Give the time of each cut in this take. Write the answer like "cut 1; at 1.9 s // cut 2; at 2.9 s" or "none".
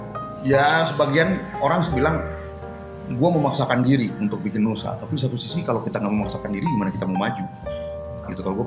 none